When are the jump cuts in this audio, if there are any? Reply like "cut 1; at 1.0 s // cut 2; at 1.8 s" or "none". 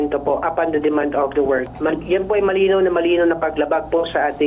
none